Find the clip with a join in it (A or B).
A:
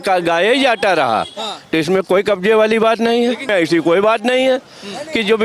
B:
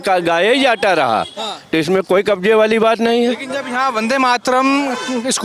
A